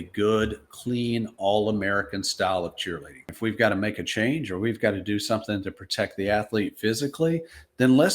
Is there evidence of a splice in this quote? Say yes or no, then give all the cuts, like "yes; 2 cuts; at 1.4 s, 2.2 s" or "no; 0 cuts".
yes; 1 cut; at 3.3 s